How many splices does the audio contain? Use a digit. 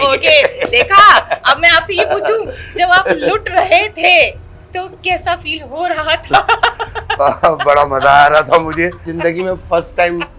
1